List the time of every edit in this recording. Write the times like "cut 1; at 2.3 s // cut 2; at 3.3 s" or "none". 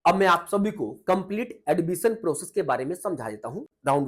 none

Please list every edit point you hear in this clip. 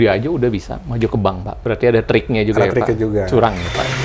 cut 1; at 1.5 s

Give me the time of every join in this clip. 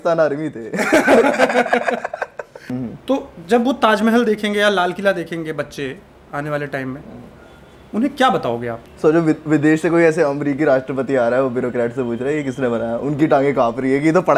cut 1; at 2.7 s // cut 2; at 8.8 s

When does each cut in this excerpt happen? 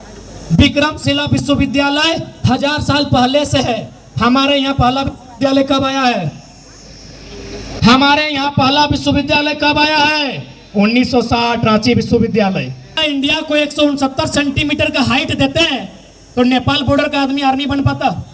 cut 1; at 13.0 s

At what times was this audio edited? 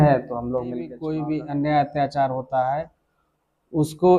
cut 1; at 1.0 s

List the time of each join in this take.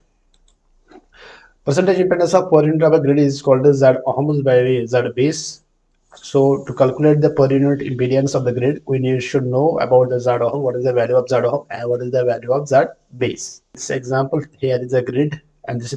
cut 1; at 13.8 s

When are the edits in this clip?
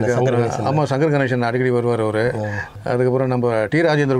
cut 1; at 2.6 s

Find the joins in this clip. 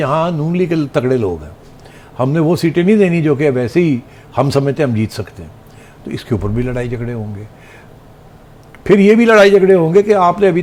none

